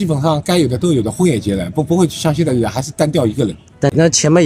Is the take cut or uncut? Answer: uncut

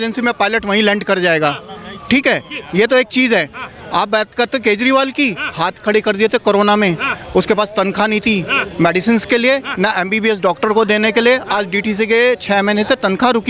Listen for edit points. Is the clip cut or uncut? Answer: uncut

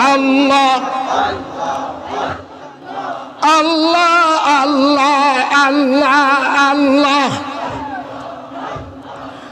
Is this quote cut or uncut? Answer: cut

